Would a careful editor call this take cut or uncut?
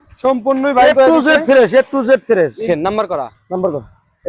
cut